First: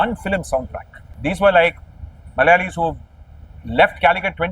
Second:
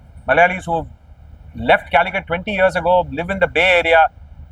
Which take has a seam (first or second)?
first